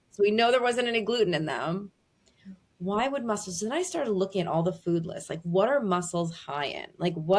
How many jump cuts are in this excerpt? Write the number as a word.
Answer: zero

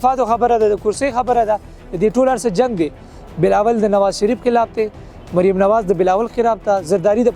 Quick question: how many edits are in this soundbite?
zero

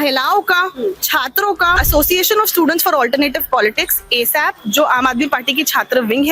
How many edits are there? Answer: one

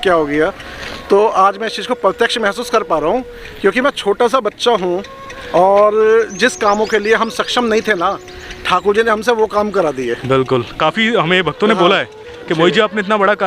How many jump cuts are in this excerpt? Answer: one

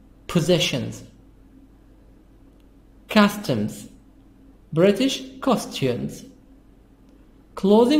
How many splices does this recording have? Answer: zero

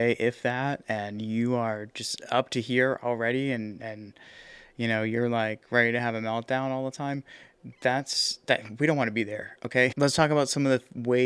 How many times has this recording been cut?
zero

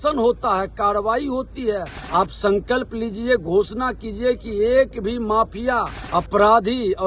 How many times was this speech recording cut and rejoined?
two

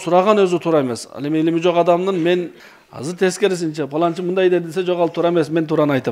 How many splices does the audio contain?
one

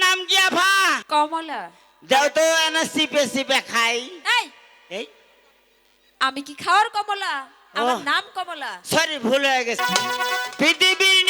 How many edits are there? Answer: two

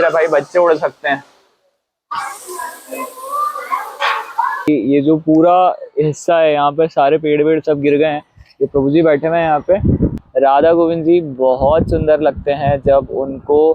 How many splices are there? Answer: two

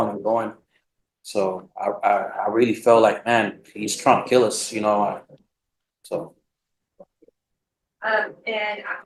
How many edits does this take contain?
zero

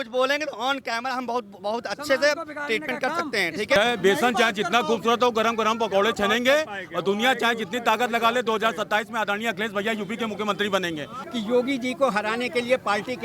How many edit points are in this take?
two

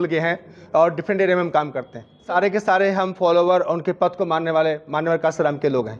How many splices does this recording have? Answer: one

